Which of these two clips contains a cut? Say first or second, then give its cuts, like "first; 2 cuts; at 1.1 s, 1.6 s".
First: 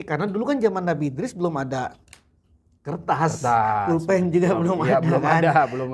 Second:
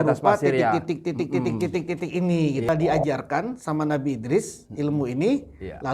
second; 1 cut; at 2.7 s